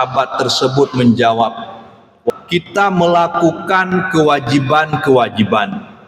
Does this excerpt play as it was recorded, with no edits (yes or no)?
no